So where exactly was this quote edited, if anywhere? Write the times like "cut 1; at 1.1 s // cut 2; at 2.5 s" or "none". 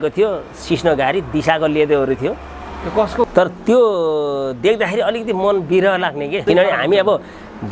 cut 1; at 3.2 s // cut 2; at 6.4 s